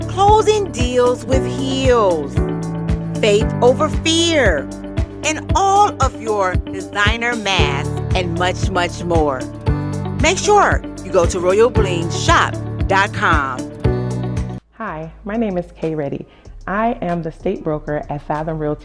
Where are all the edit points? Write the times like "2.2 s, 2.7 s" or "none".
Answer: 14.6 s

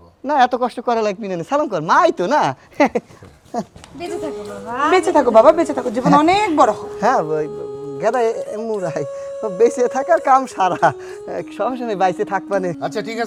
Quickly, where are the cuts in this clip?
none

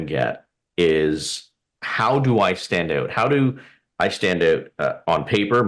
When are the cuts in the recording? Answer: none

